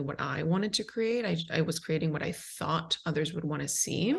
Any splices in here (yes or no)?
no